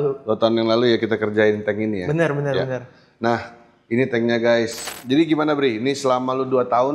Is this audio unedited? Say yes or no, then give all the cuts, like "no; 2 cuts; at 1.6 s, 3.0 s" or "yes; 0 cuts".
no; 1 cut; at 4.9 s